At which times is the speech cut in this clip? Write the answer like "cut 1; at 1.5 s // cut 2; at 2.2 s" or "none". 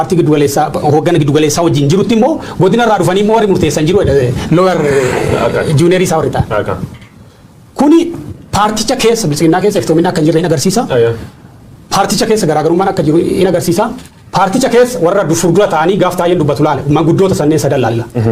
none